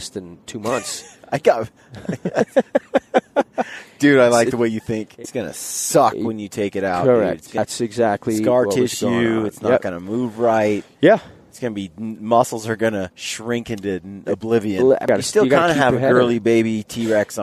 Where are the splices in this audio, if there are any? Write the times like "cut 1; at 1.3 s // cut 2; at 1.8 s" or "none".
cut 1; at 5.2 s // cut 2; at 7.6 s // cut 3; at 13.3 s // cut 4; at 15.0 s